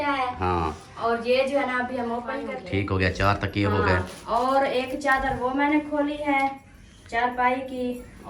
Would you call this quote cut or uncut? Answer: cut